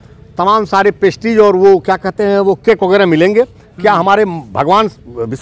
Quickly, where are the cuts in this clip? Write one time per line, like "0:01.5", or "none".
none